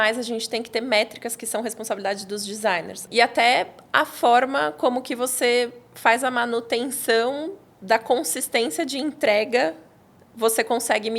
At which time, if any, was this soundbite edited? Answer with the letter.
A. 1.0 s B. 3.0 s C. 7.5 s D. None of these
B